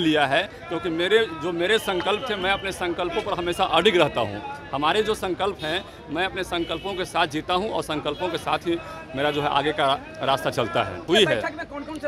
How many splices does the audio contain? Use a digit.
1